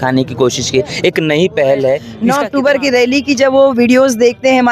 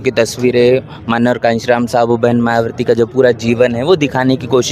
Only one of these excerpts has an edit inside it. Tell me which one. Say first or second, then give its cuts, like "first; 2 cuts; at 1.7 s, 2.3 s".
first; 1 cut; at 2.1 s